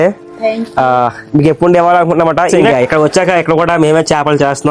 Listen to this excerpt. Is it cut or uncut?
cut